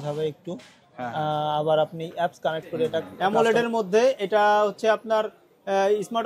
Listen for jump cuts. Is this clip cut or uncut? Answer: cut